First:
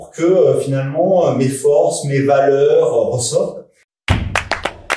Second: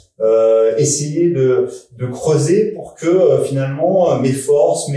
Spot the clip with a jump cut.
first; 1 cut; at 3.9 s

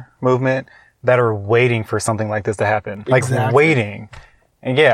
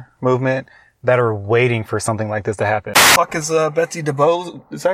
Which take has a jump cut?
second; 1 cut; at 2.9 s

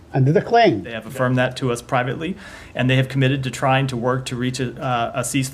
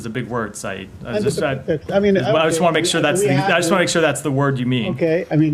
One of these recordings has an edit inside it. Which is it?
first; 1 cut; at 1.0 s

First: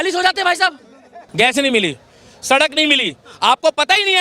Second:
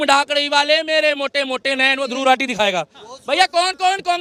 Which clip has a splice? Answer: first; 1 cut; at 1.2 s

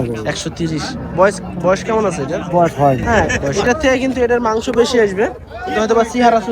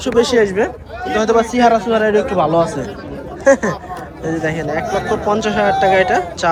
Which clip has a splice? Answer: first; 1 cut; at 3.5 s

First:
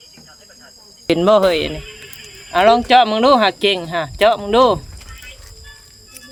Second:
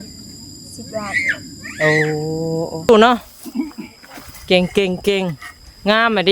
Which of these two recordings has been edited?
second; 1 cut; at 2.9 s

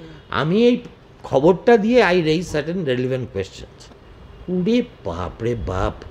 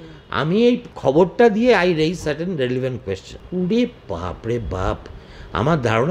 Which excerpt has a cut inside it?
second; 2 cuts; at 0.9 s, 3.3 s

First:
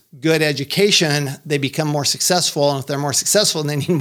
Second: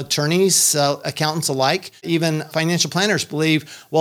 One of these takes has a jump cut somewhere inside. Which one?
second; 2 cuts; at 1.1 s, 2.4 s

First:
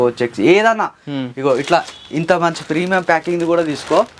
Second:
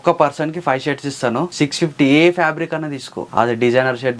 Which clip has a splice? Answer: second; 2 cuts; at 1.5 s, 3.2 s

